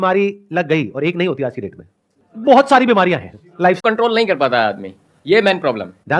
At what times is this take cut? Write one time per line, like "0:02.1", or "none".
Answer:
0:03.8